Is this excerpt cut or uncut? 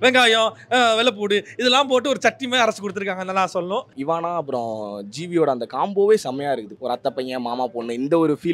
cut